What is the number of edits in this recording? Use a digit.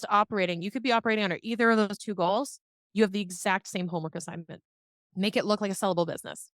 1